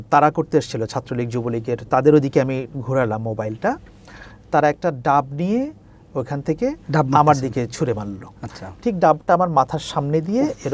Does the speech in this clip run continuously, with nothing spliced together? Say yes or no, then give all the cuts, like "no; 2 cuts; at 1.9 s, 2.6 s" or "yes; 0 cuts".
yes; 0 cuts